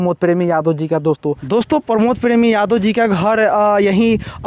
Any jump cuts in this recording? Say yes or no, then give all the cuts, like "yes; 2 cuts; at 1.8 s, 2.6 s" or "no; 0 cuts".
yes; 1 cut; at 1.2 s